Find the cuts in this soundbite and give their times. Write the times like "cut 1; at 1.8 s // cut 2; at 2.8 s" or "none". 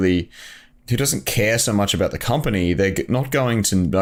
none